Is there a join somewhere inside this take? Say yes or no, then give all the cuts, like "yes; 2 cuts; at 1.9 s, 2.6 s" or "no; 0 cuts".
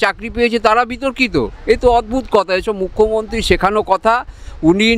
no; 0 cuts